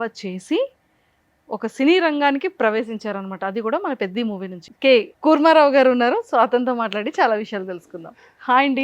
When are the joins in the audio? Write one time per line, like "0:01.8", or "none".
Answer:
0:04.6

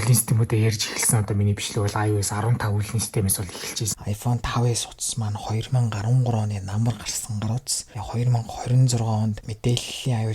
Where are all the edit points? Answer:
0:03.9
0:07.8
0:09.5

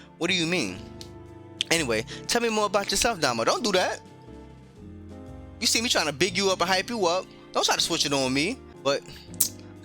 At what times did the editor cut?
0:08.7

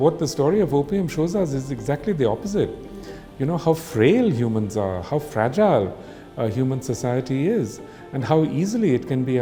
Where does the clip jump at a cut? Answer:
none

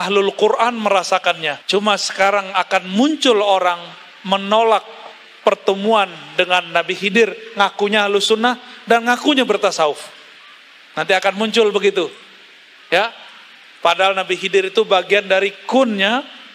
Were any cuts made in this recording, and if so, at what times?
0:01.5

